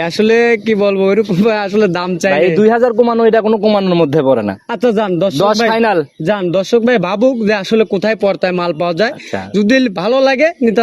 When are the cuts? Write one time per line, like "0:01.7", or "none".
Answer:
none